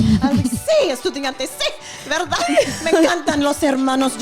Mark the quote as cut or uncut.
uncut